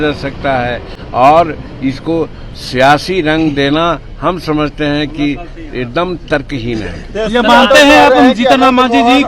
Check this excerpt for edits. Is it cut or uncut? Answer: uncut